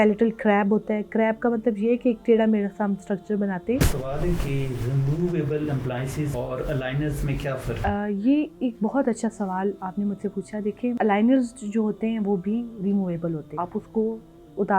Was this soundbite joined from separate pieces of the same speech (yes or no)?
yes